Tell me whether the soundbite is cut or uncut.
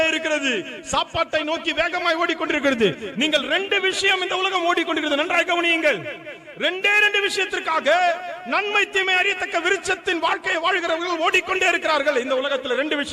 uncut